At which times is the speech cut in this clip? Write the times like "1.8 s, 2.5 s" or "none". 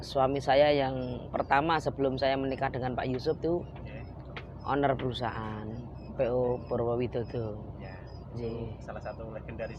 none